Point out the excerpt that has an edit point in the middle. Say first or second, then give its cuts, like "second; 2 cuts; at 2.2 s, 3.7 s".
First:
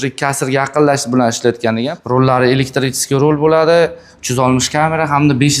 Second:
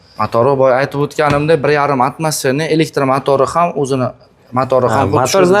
first; 1 cut; at 1.9 s